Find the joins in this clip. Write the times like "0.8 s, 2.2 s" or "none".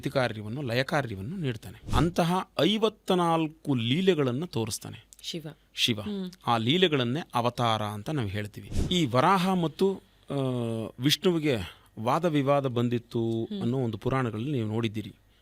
1.8 s, 8.8 s